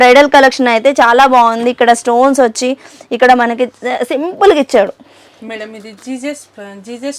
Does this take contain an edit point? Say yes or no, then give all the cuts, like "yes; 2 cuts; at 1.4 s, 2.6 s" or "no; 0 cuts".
no; 0 cuts